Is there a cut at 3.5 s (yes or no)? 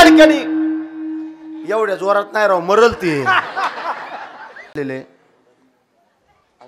no